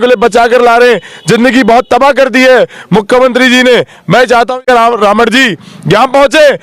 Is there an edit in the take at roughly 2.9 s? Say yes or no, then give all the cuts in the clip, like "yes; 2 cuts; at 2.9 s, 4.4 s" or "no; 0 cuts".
no; 1 cut; at 4.6 s